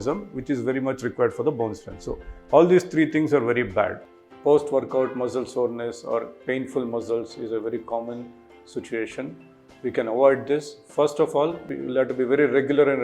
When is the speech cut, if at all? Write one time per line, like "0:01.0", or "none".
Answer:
0:04.0